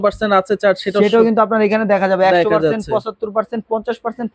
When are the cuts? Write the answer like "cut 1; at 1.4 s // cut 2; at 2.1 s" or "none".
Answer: none